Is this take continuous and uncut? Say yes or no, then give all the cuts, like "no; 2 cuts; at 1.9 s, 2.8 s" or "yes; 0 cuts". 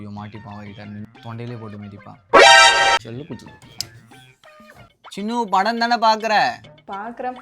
no; 2 cuts; at 3.0 s, 4.9 s